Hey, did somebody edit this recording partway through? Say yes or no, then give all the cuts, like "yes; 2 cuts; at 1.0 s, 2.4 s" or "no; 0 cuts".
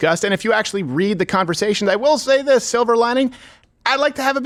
no; 0 cuts